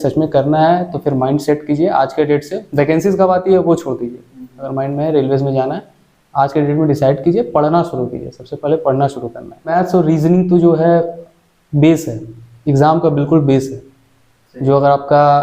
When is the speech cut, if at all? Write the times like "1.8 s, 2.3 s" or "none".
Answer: 9.7 s